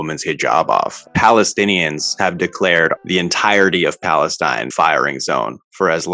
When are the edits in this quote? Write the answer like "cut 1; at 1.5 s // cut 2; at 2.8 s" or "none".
cut 1; at 1.0 s // cut 2; at 3.0 s // cut 3; at 4.7 s